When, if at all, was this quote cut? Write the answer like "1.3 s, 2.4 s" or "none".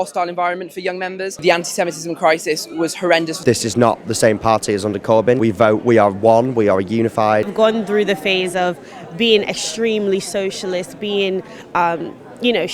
1.4 s, 3.4 s, 5.4 s, 7.5 s